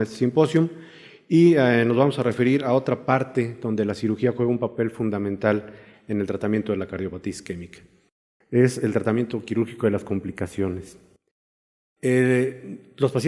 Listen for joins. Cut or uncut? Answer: cut